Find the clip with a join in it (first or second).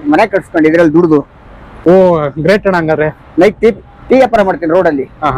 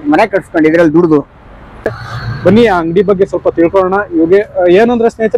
second